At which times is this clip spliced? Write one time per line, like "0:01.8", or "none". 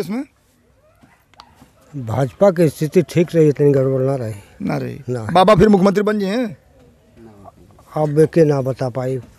none